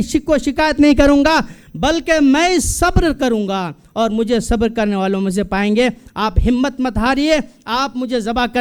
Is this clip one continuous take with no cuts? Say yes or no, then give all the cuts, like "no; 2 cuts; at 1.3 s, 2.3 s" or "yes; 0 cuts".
yes; 0 cuts